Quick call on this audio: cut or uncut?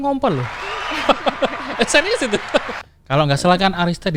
cut